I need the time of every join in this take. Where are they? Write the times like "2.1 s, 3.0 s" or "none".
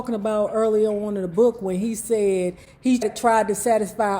3.1 s